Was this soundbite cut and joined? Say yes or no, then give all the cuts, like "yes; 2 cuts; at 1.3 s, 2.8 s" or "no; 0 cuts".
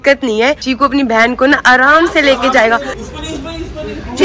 yes; 1 cut; at 3.0 s